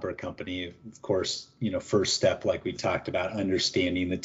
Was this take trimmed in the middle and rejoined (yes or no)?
no